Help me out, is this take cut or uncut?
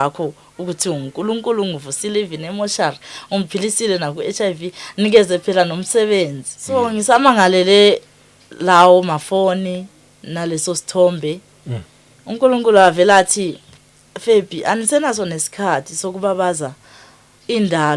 cut